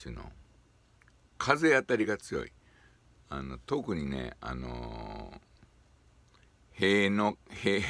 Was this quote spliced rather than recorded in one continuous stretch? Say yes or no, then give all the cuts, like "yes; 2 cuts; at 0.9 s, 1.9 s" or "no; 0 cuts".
no; 0 cuts